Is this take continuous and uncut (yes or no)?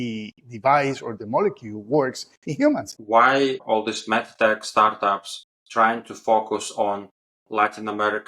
no